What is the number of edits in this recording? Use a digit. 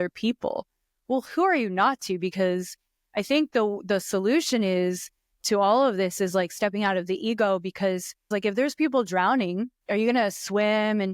2